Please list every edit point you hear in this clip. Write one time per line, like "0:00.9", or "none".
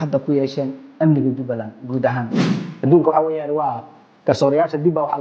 0:02.7